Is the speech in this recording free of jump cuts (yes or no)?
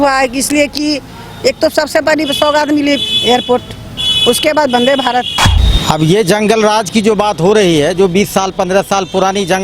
no